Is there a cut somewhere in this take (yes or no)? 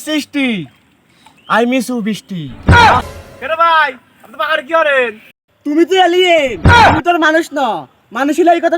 yes